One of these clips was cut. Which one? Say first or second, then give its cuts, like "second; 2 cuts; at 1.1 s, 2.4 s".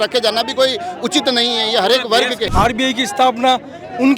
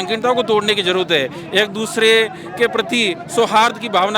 first; 1 cut; at 2.5 s